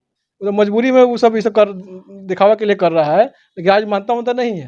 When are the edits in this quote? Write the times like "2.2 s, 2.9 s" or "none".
none